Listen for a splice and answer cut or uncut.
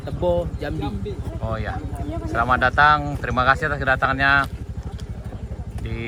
uncut